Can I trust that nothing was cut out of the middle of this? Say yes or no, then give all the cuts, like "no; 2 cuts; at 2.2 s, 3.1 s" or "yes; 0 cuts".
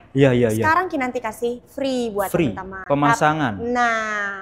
yes; 0 cuts